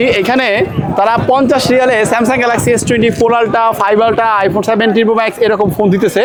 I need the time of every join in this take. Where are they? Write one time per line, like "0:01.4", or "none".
none